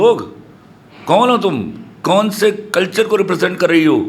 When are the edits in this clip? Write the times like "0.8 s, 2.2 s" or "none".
none